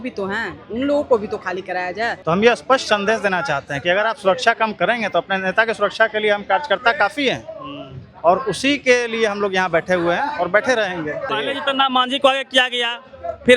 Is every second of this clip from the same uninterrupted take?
no; 2 cuts; at 2.1 s, 11.3 s

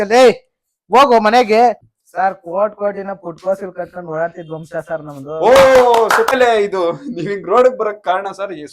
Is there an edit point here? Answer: yes; 2 cuts; at 1.9 s, 6.3 s

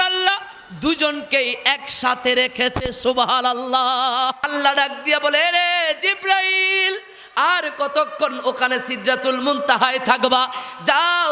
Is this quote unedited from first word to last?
no; 1 cut; at 4.5 s

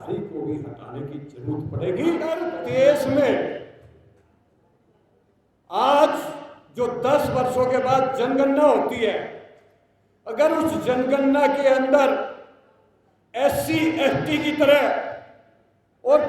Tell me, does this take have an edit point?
yes; 1 cut; at 2.4 s

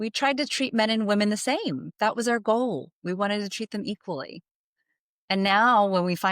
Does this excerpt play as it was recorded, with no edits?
no; 1 cut; at 1.9 s

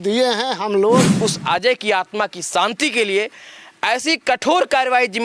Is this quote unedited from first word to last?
no; 1 cut; at 1.1 s

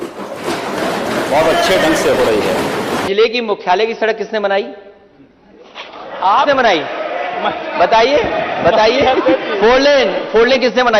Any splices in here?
yes; 1 cut; at 3.0 s

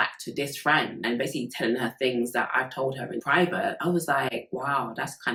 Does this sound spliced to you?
no; 0 cuts

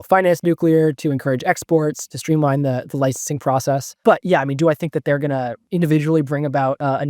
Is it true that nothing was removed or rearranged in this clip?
no; 3 cuts; at 2.1 s, 4.0 s, 5.6 s

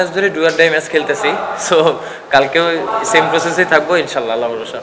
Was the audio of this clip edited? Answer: no; 0 cuts

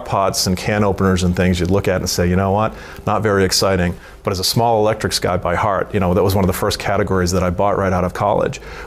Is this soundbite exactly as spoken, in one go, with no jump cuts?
yes; 0 cuts

